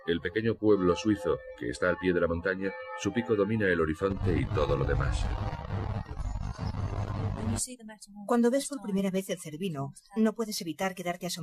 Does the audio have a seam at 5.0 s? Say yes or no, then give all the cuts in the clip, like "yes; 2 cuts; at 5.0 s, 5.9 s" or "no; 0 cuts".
no; 1 cut; at 8.6 s